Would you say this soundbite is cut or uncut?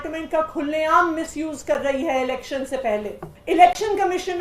cut